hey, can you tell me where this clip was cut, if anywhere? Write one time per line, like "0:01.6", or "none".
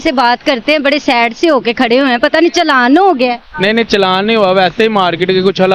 none